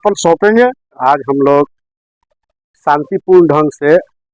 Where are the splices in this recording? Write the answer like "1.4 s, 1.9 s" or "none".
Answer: 1.0 s

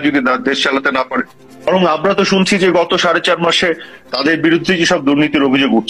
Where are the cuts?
1.7 s

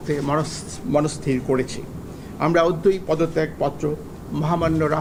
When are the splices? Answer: none

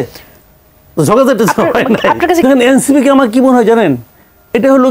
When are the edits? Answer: 2.4 s

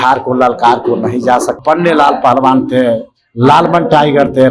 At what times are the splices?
1.6 s

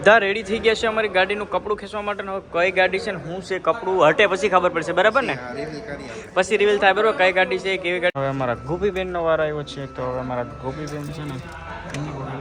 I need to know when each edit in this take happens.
8.2 s

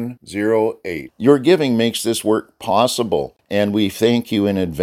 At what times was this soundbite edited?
3.4 s

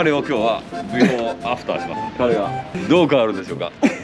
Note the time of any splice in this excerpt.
2.0 s, 2.8 s

